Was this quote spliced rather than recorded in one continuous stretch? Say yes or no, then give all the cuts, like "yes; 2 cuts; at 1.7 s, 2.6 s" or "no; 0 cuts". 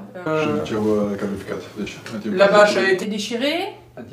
no; 0 cuts